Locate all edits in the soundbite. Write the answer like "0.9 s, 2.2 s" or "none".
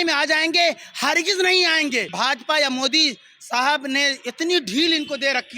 2.1 s